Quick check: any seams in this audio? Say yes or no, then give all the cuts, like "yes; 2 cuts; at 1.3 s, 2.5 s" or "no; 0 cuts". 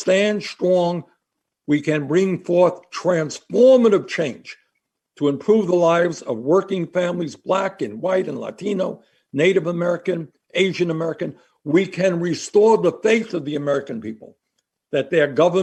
no; 0 cuts